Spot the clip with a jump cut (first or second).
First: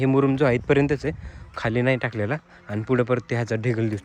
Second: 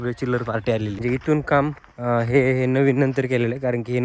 second